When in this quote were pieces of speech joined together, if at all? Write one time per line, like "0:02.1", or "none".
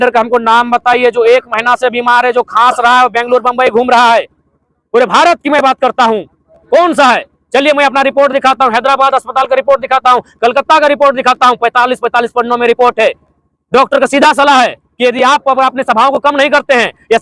none

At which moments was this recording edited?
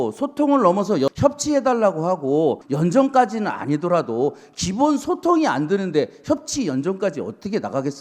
0:02.6

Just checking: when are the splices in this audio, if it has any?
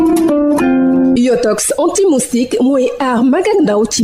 0:01.1

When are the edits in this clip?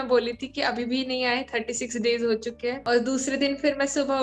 0:02.8

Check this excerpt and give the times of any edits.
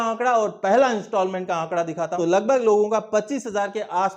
0:02.1

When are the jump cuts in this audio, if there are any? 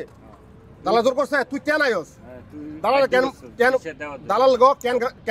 none

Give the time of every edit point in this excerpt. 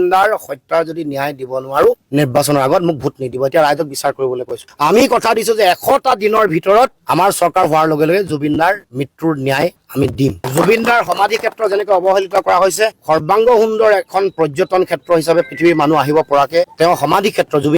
0:10.4

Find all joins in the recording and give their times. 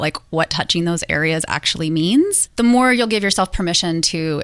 0:02.4

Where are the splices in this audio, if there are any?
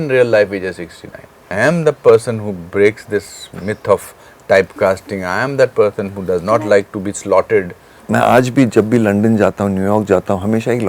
0:01.4
0:08.0

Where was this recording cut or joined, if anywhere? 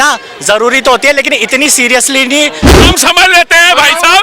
0:02.8

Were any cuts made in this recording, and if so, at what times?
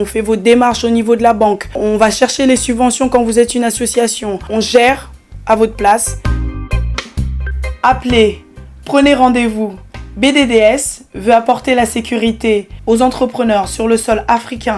none

